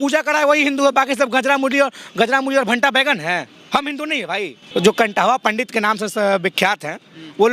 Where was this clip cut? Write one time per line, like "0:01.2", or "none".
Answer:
0:04.6